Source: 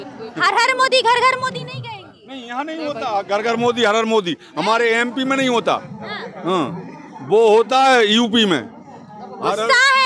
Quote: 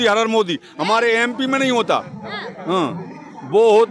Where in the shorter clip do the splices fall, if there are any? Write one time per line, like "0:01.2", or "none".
none

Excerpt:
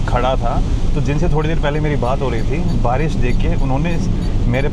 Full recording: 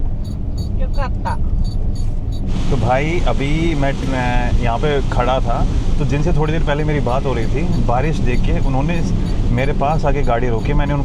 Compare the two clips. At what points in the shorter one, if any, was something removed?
none

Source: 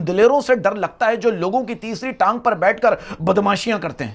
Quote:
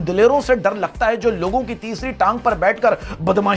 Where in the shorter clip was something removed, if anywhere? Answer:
none

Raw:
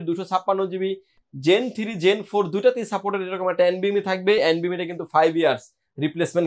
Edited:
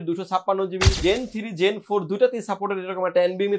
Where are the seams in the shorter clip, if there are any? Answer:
0:00.9

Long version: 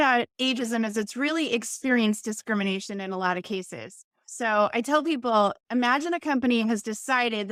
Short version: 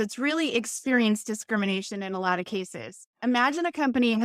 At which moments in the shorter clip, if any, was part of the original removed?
0:03.1

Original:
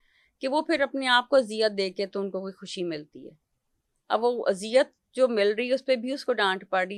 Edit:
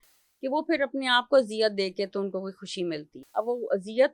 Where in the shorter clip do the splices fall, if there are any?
0:03.2

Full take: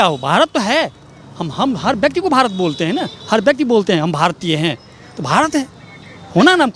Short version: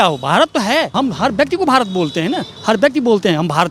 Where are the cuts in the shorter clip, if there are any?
0:00.9

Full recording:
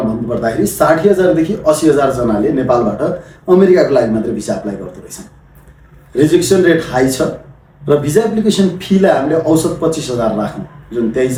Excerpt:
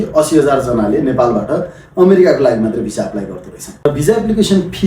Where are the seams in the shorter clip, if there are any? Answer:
0:03.9

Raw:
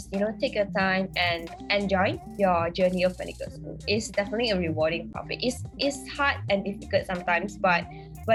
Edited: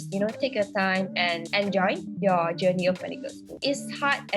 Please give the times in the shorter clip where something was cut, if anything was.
0:01.4
0:03.5

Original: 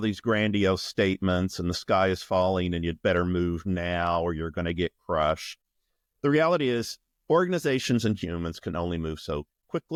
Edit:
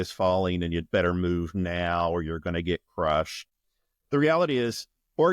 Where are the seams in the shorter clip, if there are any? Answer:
none

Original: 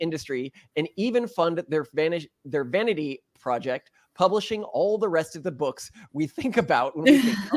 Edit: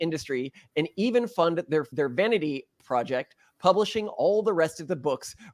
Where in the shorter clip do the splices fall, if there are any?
0:01.9

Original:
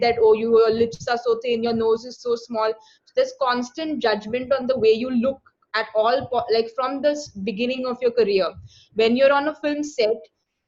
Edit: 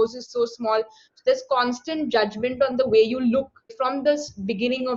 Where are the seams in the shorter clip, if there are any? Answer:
0:03.7

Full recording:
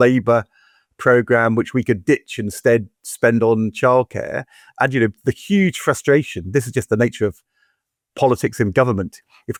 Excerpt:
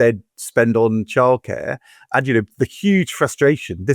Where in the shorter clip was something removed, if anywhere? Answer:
none

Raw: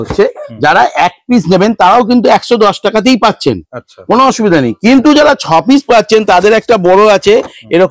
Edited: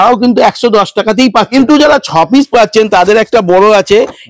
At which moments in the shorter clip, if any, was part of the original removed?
0:01.5

